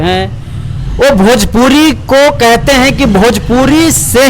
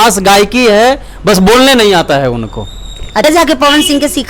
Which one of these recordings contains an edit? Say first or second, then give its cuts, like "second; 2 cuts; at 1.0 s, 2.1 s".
second; 1 cut; at 3.2 s